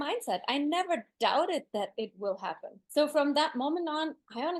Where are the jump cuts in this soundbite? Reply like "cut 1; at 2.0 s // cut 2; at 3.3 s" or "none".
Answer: none

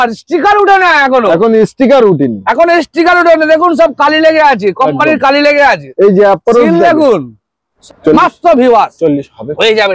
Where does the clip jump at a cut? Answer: cut 1; at 7.7 s

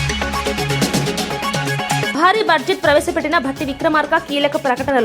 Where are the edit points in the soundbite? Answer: cut 1; at 2.1 s

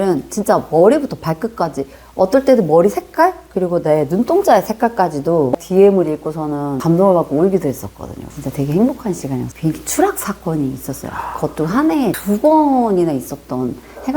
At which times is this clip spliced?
cut 1; at 5.5 s // cut 2; at 9.5 s

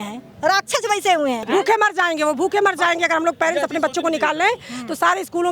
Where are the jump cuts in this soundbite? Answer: cut 1; at 1.4 s

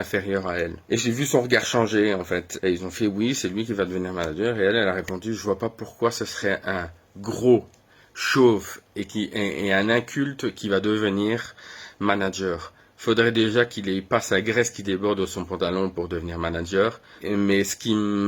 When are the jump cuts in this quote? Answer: cut 1; at 2.5 s

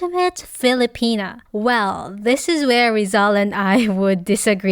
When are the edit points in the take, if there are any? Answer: cut 1; at 1.4 s

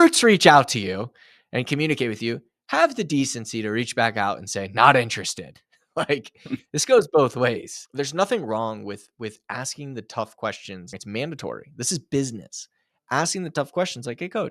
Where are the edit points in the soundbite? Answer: cut 1; at 7.8 s // cut 2; at 11.0 s

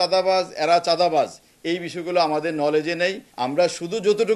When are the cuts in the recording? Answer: cut 1; at 3.3 s

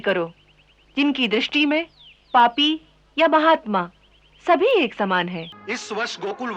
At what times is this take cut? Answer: cut 1; at 5.5 s

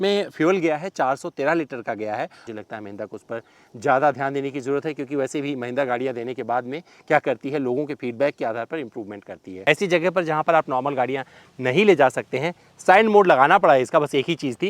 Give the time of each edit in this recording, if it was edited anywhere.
cut 1; at 2.4 s // cut 2; at 9.5 s

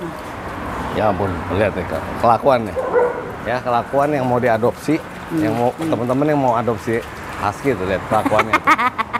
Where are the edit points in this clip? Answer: none

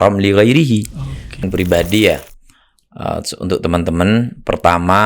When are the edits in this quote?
cut 1; at 1.4 s

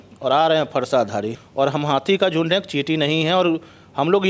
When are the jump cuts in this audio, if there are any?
cut 1; at 1.4 s

